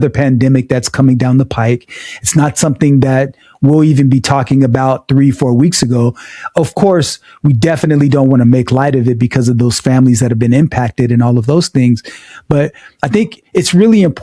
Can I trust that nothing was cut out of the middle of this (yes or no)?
yes